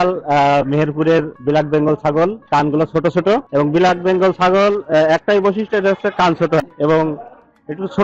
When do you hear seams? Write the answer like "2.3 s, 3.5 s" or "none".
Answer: 1.3 s, 2.4 s, 3.5 s, 6.6 s